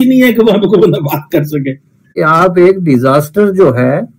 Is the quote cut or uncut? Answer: cut